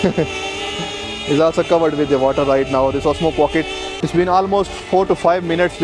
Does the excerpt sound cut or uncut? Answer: cut